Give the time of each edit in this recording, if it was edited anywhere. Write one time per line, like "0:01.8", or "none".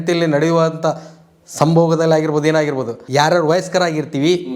0:03.0